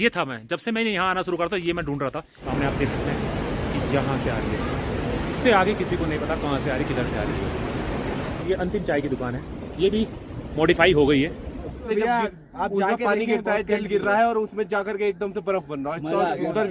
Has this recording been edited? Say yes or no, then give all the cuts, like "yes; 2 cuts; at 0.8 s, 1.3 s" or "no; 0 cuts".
yes; 3 cuts; at 2.4 s, 8.4 s, 11.9 s